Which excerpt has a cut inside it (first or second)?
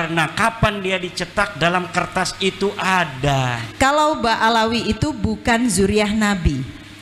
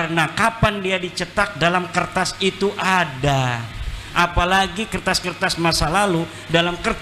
first